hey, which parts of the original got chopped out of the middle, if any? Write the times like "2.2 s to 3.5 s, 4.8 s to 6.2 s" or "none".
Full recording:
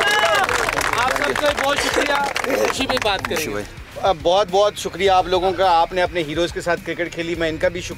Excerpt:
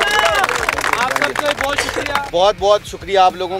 2.3 s to 4.2 s